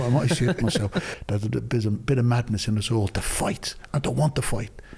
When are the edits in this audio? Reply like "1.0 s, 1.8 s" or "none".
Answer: 1.1 s